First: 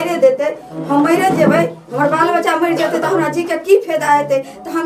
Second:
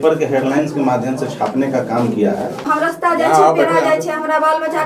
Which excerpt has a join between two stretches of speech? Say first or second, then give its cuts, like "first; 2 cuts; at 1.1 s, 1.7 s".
second; 1 cut; at 2.7 s